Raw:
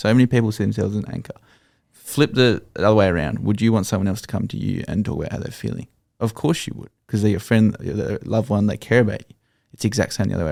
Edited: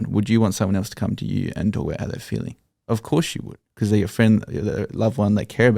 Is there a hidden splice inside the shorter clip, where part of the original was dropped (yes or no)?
no